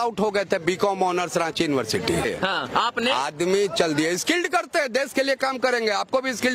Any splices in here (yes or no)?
yes